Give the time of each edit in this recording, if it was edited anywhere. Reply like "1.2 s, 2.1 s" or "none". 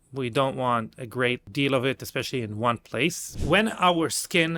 1.4 s, 3.3 s